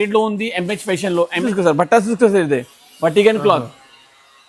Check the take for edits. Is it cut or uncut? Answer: cut